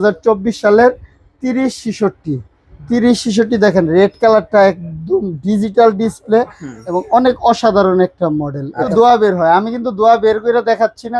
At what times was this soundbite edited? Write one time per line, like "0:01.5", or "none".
0:08.9